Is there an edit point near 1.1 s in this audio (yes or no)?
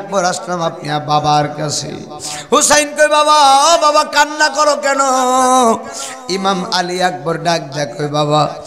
no